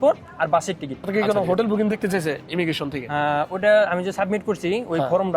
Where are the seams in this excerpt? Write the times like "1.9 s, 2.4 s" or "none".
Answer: 1.1 s